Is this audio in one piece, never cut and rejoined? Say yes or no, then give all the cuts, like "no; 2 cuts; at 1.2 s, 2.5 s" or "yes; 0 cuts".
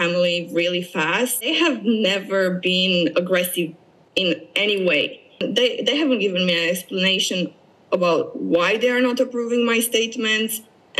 no; 2 cuts; at 1.4 s, 5.4 s